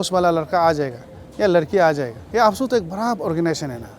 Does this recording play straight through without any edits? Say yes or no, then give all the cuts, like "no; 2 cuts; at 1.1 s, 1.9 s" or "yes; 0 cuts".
no; 1 cut; at 2.2 s